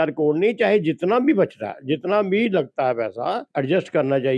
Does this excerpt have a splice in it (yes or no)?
yes